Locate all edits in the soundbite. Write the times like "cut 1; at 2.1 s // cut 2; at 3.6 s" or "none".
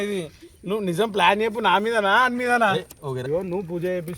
cut 1; at 3.2 s